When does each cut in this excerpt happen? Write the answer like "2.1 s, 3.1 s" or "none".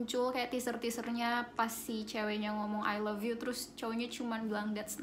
none